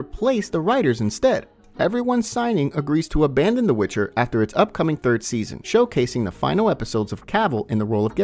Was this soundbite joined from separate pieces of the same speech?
yes; 2 cuts; at 1.6 s, 5.6 s

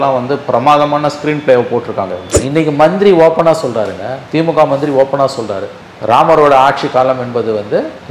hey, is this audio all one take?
no; 1 cut; at 2.3 s

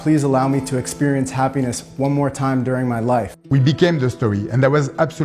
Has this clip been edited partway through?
yes; 1 cut; at 3.4 s

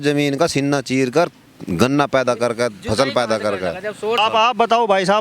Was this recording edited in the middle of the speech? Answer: yes; 1 cut; at 4.2 s

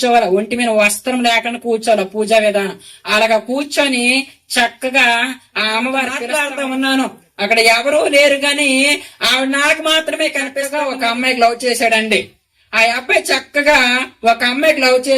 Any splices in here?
yes; 2 cuts; at 6.2 s, 10.6 s

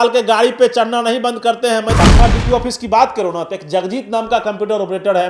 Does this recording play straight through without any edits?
no; 1 cut; at 1.9 s

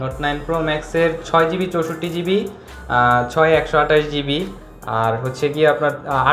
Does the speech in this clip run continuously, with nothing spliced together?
yes; 0 cuts

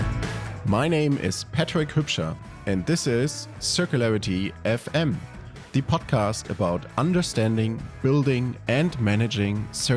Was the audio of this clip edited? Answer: no; 0 cuts

